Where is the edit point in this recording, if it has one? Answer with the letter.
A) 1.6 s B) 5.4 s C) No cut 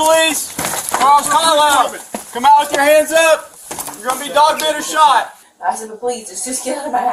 B